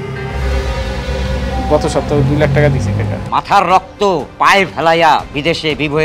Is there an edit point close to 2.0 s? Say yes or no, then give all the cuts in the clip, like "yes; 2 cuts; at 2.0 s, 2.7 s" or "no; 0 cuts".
no; 2 cuts; at 3.2 s, 4.3 s